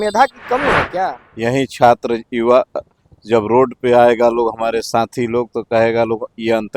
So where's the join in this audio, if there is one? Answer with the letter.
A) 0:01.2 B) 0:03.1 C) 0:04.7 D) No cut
A